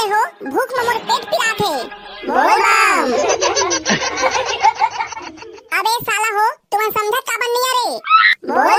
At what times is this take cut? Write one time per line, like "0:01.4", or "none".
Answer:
none